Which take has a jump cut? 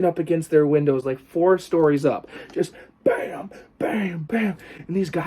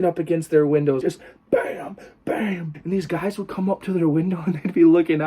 second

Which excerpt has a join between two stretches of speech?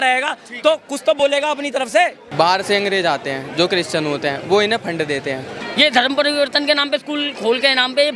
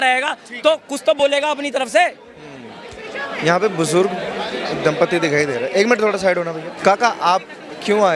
first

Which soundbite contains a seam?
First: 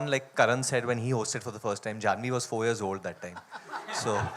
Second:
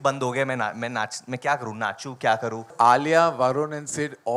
second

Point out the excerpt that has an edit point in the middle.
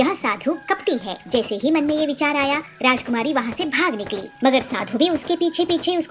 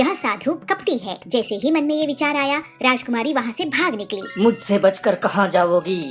second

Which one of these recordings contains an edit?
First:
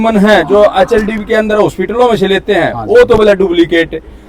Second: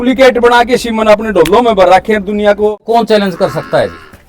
second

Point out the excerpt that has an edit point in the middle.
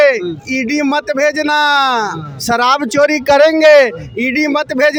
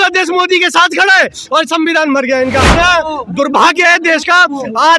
second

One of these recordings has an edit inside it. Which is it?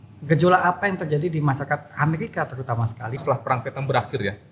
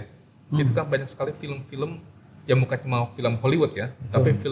first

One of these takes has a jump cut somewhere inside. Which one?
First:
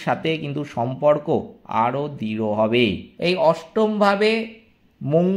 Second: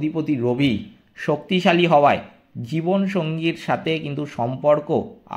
first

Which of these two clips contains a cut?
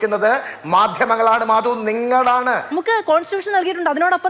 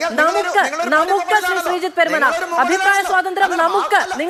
first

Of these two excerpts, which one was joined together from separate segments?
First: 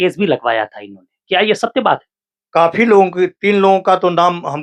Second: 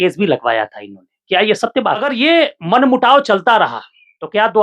second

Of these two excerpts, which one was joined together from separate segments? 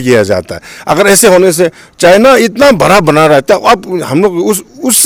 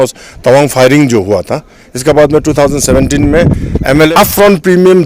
second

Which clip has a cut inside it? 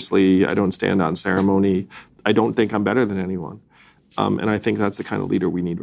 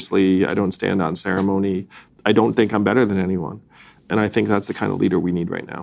second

